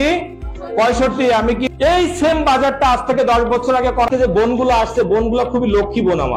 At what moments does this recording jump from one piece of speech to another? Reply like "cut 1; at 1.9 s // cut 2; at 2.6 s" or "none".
cut 1; at 1.7 s // cut 2; at 4.1 s